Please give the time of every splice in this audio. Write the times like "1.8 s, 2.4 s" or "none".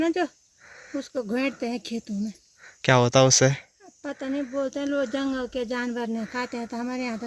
none